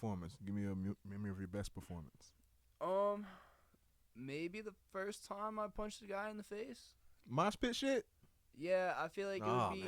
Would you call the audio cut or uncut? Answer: uncut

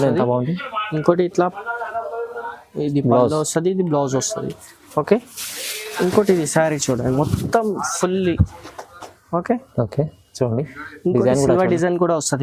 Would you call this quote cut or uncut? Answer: uncut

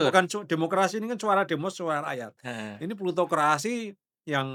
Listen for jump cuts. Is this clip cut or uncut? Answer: uncut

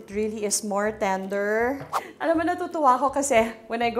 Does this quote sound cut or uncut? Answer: cut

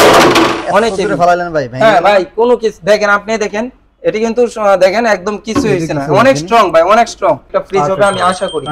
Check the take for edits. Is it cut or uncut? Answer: cut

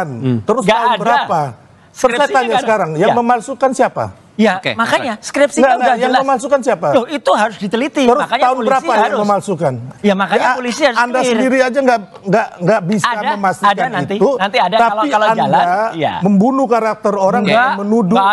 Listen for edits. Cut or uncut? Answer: uncut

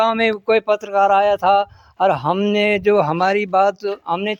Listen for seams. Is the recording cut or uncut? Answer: uncut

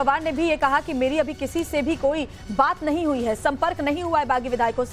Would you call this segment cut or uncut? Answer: cut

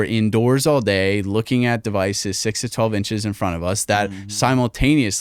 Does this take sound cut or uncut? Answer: uncut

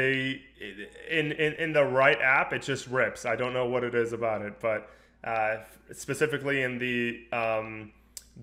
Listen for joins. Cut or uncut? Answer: uncut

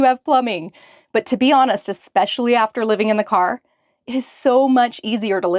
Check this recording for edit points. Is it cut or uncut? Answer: uncut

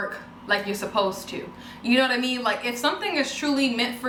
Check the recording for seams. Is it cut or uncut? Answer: uncut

